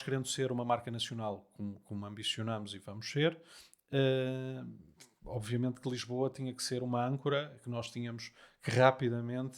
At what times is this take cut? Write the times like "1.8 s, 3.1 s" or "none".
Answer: none